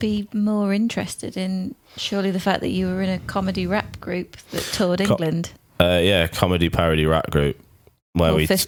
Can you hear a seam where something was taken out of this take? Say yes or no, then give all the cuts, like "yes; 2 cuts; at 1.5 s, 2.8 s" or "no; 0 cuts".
no; 0 cuts